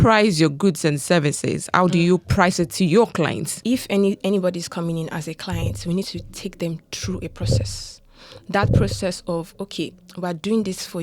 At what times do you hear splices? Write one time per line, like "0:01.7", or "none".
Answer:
0:03.5